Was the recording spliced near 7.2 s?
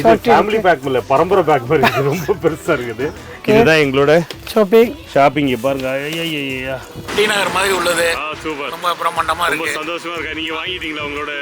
yes; 2 cuts; at 3.3 s, 7.2 s

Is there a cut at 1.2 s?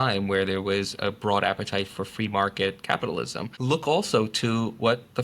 no; 1 cut; at 3.5 s

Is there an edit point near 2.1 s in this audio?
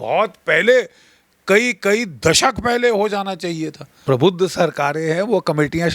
no; 1 cut; at 3.9 s

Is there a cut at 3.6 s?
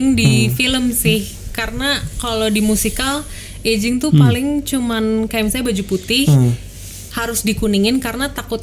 no; 0 cuts

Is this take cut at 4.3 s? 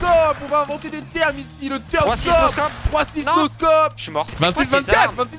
yes; 1 cut; at 4.3 s

